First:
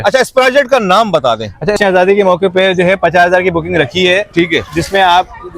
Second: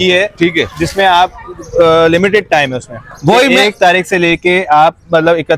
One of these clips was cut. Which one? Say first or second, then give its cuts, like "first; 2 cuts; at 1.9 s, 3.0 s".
first; 1 cut; at 1.8 s